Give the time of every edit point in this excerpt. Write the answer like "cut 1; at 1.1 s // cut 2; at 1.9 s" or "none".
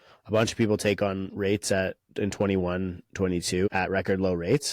cut 1; at 3.7 s